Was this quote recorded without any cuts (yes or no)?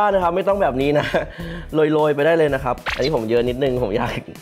yes